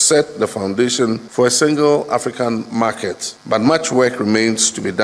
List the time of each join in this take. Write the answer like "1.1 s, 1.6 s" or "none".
1.2 s, 3.3 s